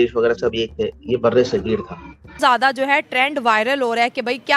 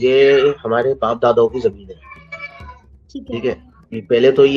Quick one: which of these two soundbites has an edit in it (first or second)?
first